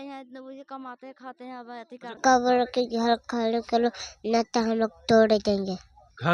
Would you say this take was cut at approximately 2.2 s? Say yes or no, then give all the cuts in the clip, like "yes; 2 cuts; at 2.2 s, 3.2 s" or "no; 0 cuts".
yes; 1 cut; at 2.2 s